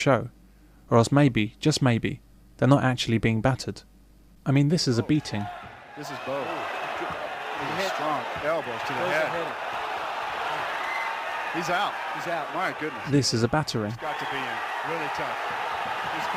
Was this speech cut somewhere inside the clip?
yes; 1 cut; at 5.3 s

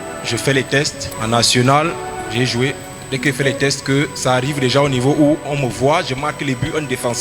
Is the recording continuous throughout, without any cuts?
no; 1 cut; at 1.1 s

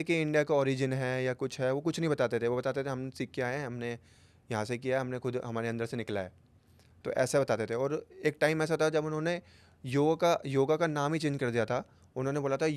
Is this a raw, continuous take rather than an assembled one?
yes; 0 cuts

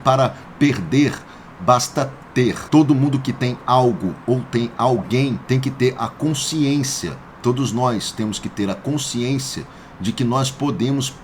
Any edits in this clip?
yes; 2 cuts; at 2.6 s, 5.4 s

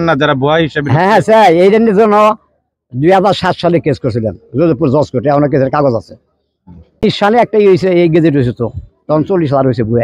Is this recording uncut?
no; 1 cut; at 7.0 s

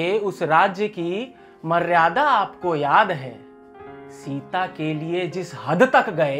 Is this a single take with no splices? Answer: yes; 0 cuts

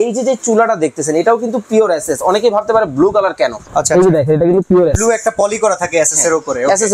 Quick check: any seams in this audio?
no; 0 cuts

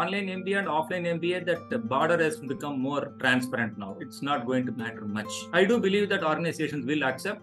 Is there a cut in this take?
no; 0 cuts

